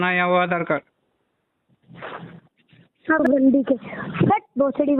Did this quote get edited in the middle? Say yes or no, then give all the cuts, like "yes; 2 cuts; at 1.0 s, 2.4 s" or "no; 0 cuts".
yes; 1 cut; at 3.2 s